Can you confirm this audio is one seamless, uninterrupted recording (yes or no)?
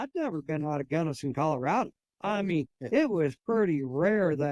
no